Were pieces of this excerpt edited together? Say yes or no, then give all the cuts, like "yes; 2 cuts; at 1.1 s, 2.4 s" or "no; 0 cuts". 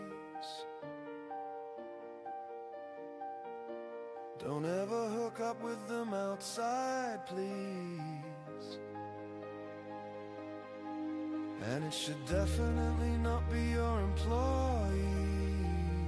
no; 0 cuts